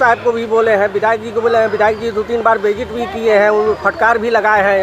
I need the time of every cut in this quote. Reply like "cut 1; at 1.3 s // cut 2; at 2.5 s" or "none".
none